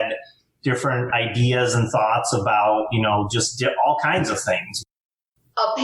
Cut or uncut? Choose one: cut